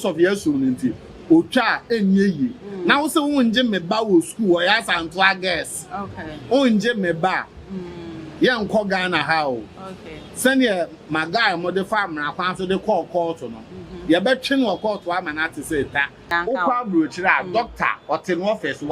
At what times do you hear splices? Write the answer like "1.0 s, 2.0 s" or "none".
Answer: 16.4 s